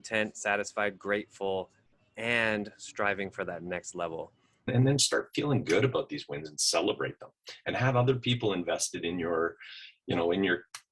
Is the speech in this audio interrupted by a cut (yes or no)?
yes